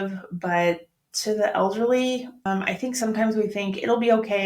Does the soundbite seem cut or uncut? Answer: cut